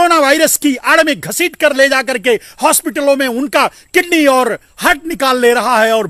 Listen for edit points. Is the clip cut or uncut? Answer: uncut